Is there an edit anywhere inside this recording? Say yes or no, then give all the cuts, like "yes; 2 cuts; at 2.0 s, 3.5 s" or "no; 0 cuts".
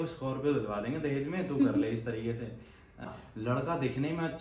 yes; 1 cut; at 3.1 s